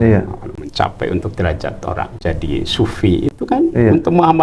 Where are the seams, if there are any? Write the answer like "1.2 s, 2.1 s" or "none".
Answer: 2.2 s